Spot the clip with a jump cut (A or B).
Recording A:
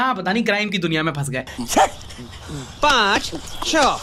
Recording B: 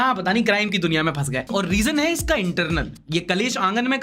B